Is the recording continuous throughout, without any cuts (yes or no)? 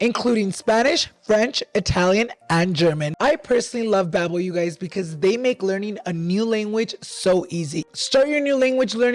no